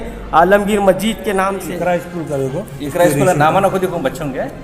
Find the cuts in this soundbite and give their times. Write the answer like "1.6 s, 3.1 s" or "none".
1.6 s